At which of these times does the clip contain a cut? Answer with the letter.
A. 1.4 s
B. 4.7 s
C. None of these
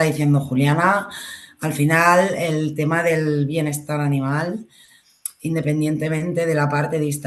C